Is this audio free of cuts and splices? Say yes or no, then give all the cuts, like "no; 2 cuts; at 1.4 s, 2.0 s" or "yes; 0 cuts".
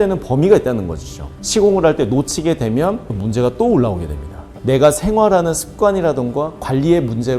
no; 1 cut; at 4.5 s